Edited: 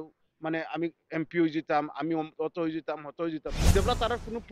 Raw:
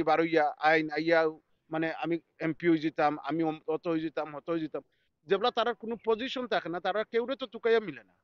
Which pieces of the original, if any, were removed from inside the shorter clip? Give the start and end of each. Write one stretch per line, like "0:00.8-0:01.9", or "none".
0:04.8-0:05.1